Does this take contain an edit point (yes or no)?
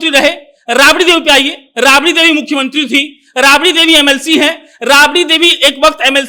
no